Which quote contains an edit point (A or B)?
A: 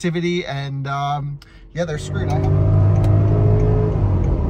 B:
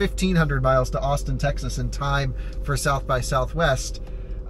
A